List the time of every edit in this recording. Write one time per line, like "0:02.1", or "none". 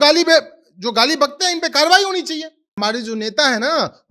0:02.8